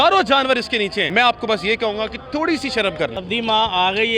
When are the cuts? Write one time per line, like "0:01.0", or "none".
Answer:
0:01.1
0:03.2